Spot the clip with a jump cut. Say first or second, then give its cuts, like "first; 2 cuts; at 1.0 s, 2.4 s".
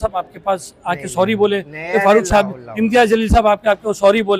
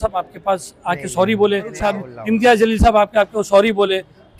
second; 1 cut; at 1.8 s